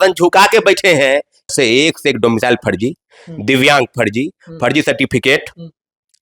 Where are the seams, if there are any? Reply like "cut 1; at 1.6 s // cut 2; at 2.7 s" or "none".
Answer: cut 1; at 1.5 s